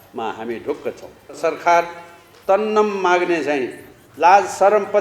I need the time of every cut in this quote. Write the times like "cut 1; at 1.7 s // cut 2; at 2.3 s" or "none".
cut 1; at 1.4 s